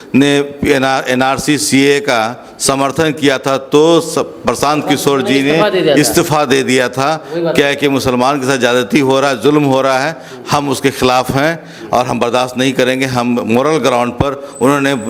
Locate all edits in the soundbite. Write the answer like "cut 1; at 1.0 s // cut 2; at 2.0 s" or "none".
none